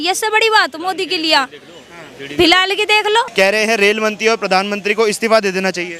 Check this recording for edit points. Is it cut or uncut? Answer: cut